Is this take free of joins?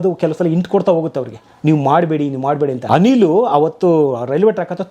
no; 1 cut; at 2.8 s

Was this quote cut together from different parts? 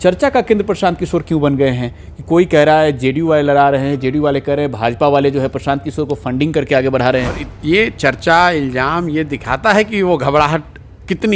yes; 1 cut; at 7.5 s

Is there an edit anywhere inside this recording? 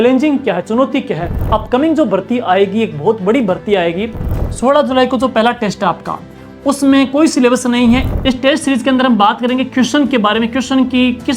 yes; 3 cuts; at 1.4 s, 4.3 s, 8.1 s

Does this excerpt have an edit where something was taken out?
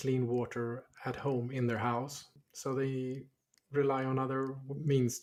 no; 0 cuts

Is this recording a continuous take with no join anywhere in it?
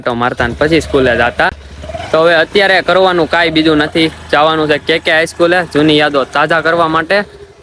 yes; 0 cuts

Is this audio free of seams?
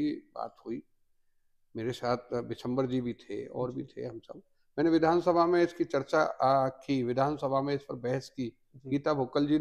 yes; 0 cuts

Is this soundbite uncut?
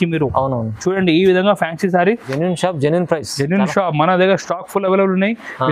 no; 1 cut; at 2.3 s

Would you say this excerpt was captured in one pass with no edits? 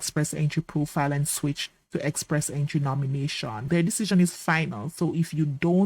no; 1 cut; at 3.6 s

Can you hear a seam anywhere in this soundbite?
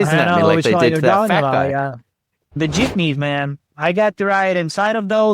yes; 2 cuts; at 2.6 s, 3.6 s

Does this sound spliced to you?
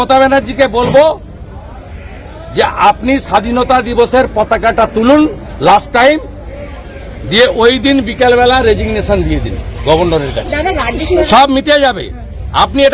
no; 0 cuts

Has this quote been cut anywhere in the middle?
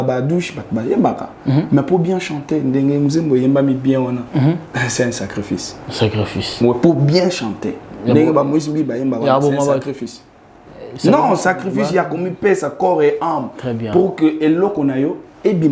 no; 0 cuts

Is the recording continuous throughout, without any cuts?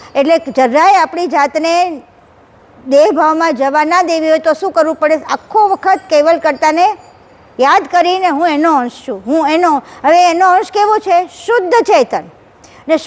yes; 0 cuts

